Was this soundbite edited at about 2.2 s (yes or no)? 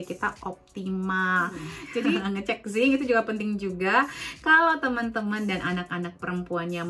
yes